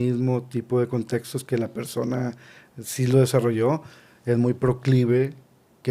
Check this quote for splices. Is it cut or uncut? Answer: uncut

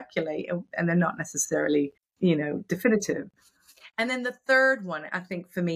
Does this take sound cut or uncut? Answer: cut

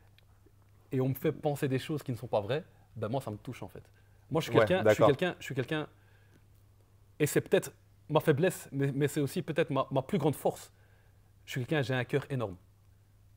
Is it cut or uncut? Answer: uncut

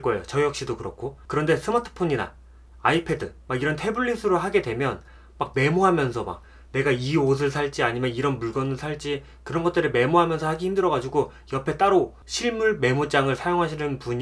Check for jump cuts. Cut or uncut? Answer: uncut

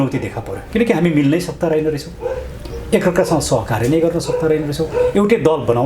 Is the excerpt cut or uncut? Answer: uncut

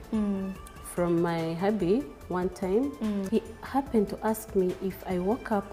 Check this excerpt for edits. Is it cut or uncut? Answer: cut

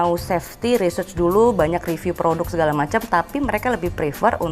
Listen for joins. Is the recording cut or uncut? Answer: uncut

